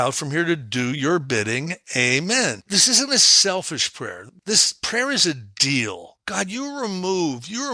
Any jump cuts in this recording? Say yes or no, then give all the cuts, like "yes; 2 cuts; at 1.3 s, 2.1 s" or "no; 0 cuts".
yes; 3 cuts; at 2.7 s, 4.2 s, 6.2 s